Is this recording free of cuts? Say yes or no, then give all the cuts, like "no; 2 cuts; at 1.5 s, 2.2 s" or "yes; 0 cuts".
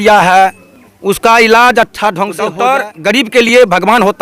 no; 1 cut; at 2.5 s